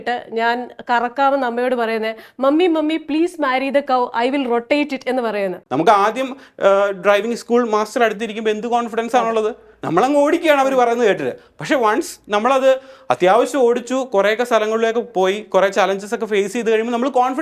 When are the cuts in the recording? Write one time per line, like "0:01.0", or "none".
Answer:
0:05.6